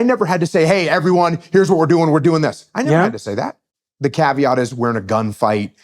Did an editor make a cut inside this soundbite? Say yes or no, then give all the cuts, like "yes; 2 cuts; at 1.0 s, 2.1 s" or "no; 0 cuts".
yes; 1 cut; at 3.6 s